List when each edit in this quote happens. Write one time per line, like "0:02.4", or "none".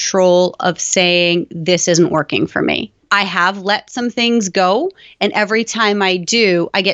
0:03.1

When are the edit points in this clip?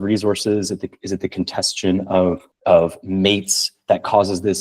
0:02.5

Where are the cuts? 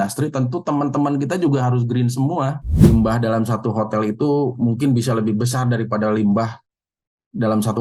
0:02.6

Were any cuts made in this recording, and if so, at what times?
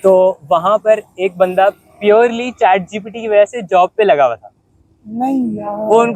none

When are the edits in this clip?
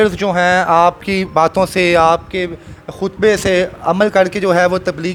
none

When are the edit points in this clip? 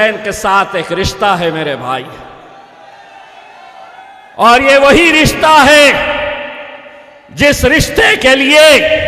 none

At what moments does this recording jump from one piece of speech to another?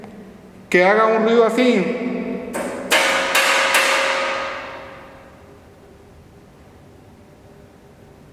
none

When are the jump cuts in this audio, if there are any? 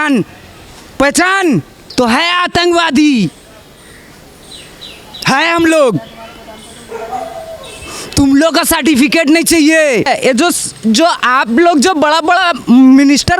0:01.8
0:10.1

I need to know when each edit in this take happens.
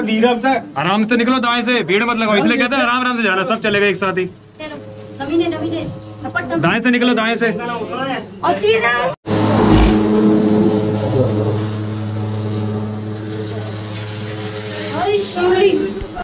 none

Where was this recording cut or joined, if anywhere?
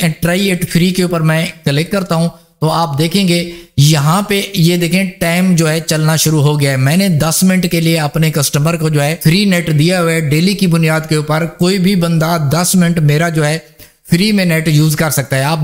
0:09.2

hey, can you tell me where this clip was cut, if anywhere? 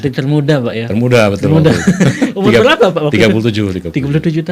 none

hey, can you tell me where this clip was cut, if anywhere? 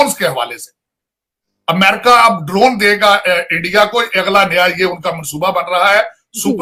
none

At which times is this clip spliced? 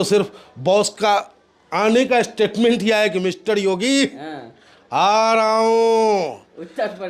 none

